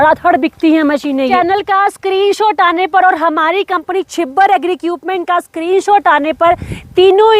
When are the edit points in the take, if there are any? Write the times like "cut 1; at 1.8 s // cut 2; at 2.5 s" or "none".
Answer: cut 1; at 1.3 s

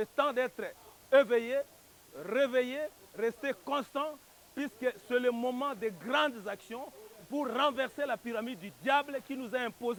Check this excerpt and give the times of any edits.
none

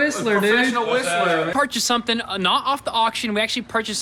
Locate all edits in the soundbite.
cut 1; at 1.5 s

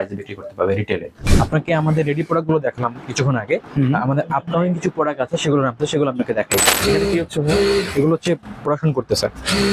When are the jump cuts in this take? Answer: cut 1; at 1.2 s // cut 2; at 6.6 s

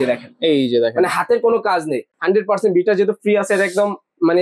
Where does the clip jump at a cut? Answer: cut 1; at 2.1 s

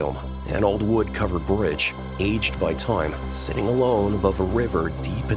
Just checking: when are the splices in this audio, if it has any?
none

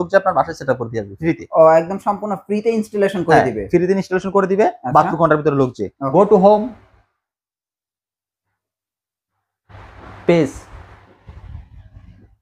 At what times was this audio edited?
cut 1; at 6.0 s

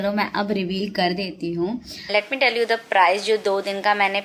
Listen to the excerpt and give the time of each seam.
cut 1; at 2.1 s

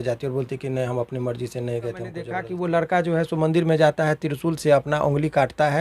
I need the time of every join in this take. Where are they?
cut 1; at 2.3 s

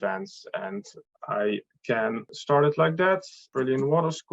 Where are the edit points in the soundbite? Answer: cut 1; at 1.0 s // cut 2; at 2.3 s // cut 3; at 3.4 s

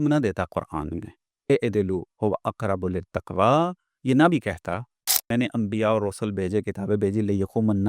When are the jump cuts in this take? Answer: cut 1; at 5.3 s

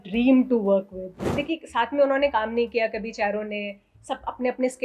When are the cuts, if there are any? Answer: cut 1; at 1.3 s

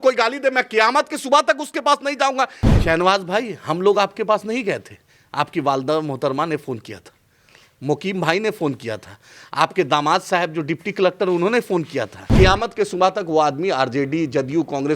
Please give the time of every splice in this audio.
cut 1; at 2.6 s // cut 2; at 12.3 s

